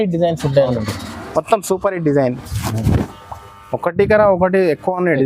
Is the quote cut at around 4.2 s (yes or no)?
no